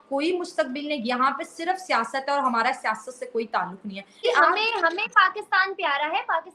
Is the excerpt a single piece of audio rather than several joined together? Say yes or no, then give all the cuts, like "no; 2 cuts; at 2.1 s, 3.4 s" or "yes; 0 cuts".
no; 1 cut; at 4.2 s